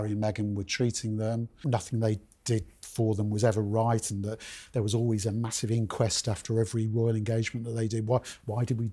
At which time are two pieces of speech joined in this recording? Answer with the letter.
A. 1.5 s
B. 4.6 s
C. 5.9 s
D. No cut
A